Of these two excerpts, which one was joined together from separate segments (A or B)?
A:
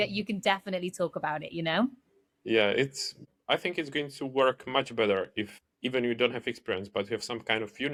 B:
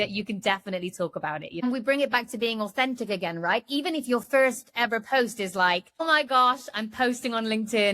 B